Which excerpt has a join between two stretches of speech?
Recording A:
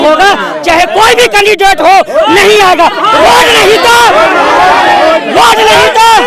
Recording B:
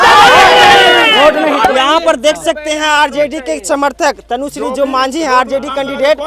B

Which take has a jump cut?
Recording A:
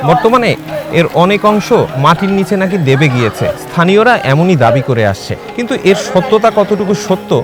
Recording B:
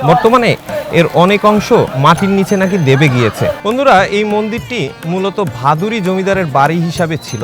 B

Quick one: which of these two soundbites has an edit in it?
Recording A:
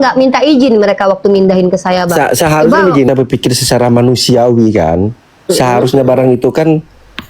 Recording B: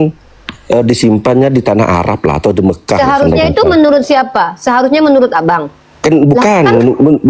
A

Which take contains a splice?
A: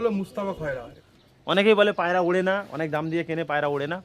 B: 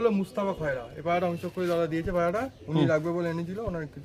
A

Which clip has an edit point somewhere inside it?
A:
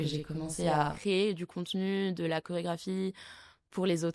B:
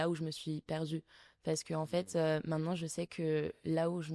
A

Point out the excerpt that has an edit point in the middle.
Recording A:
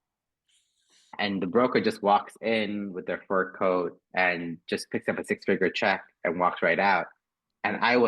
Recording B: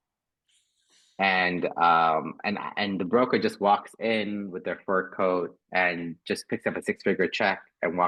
A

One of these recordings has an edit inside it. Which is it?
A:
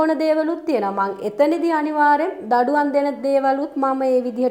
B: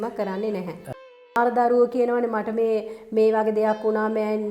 B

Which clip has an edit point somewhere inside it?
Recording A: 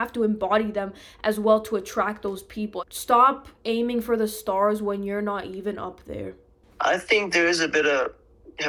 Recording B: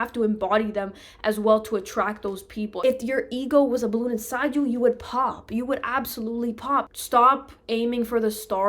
B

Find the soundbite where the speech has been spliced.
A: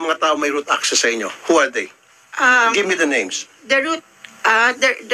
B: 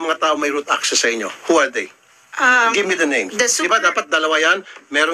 B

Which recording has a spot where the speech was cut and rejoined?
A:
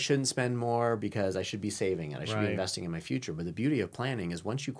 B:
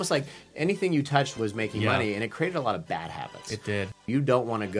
B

